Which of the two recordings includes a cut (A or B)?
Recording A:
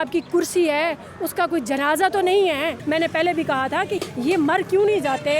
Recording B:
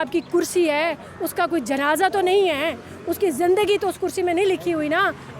A